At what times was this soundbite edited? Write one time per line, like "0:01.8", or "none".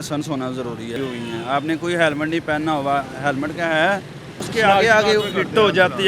0:01.0
0:04.4